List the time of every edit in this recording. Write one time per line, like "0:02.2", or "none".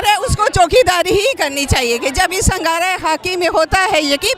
none